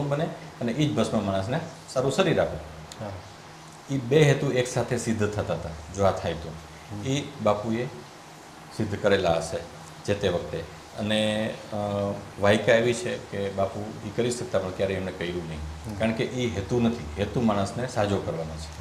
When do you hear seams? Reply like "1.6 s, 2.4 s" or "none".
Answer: none